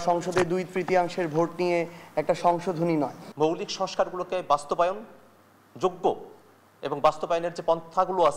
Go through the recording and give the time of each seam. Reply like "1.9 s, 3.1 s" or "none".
3.2 s

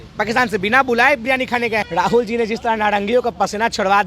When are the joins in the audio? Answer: 1.9 s

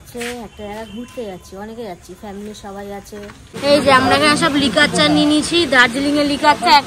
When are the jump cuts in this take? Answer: 3.6 s

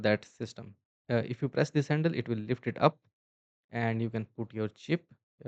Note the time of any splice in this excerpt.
0.9 s

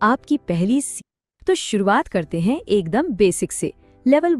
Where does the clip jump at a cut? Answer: 0.9 s

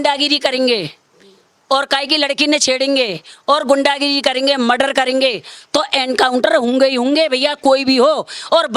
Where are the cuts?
none

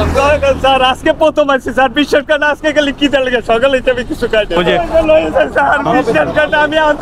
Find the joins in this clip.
4.6 s

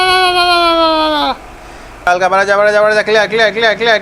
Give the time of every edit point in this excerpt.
1.4 s

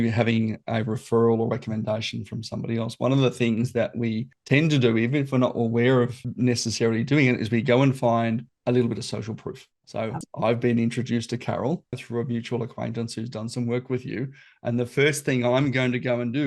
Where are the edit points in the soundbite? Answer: none

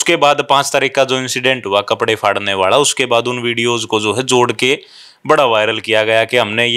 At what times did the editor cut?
none

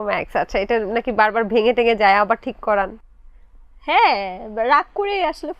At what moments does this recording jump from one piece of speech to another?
none

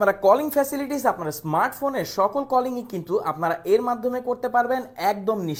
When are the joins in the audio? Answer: none

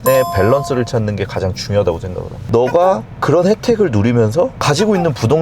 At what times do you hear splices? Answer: 2.5 s

